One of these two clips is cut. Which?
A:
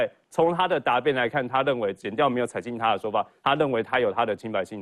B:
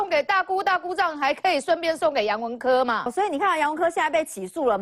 B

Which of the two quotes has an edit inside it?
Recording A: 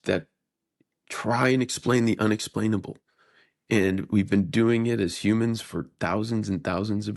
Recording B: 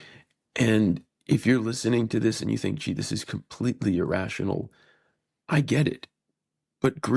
B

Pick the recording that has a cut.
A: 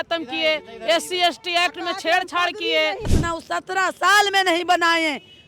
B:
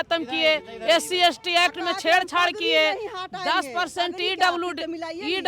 A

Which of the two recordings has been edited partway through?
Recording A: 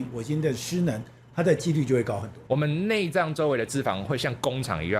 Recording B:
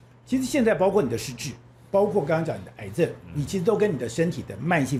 A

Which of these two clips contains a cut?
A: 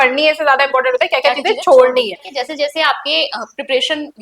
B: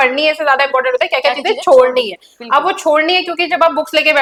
A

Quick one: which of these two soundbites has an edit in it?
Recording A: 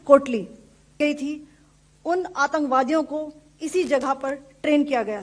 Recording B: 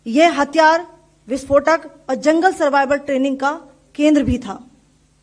A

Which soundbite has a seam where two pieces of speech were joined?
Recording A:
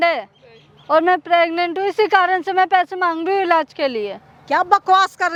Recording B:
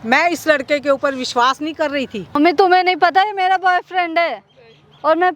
B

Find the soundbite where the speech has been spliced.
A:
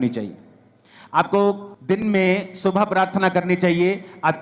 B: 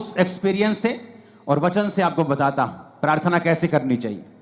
A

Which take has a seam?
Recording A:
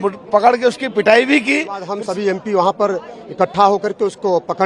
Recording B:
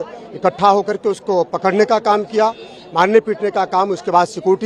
A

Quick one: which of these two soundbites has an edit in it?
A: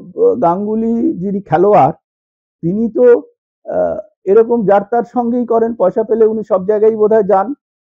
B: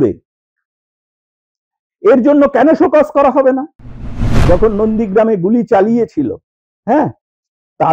B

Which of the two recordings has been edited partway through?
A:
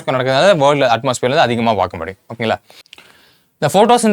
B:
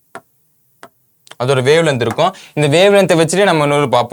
A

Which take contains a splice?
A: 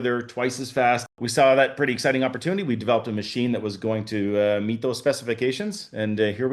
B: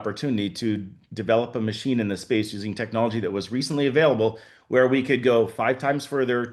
A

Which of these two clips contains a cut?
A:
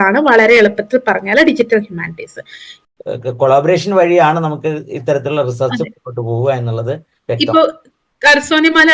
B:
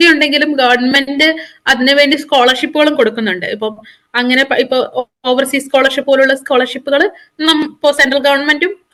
A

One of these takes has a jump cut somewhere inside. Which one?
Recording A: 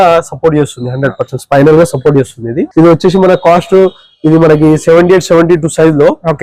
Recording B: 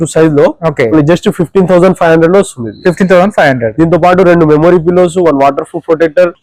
A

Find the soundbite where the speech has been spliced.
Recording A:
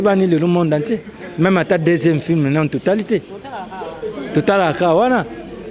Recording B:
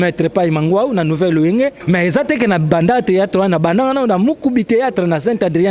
B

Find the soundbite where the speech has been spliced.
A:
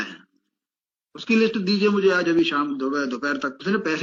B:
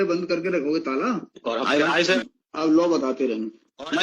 B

